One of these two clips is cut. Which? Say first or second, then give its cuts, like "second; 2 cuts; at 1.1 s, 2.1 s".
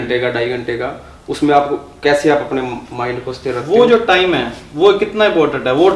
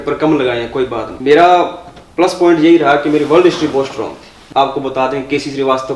second; 2 cuts; at 1.1 s, 4.3 s